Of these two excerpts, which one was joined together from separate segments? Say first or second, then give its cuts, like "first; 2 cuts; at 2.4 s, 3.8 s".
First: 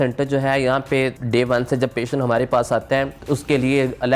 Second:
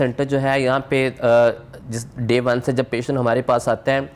first; 2 cuts; at 1.1 s, 3.2 s